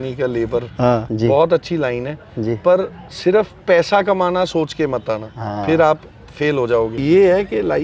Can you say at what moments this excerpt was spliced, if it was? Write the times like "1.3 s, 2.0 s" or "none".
1.1 s, 6.9 s